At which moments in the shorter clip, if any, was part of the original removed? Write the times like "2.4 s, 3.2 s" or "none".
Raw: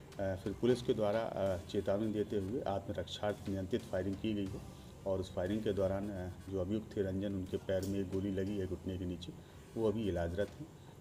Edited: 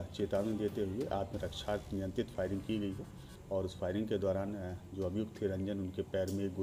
none